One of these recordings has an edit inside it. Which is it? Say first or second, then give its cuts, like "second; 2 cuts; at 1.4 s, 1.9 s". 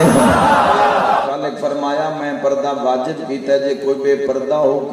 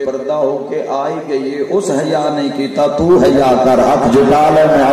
first; 1 cut; at 1.3 s